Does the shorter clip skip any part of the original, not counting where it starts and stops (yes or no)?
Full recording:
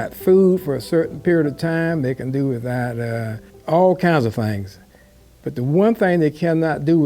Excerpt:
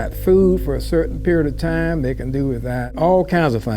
yes